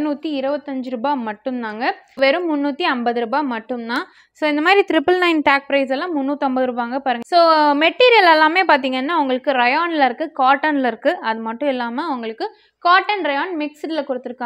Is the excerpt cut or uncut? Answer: cut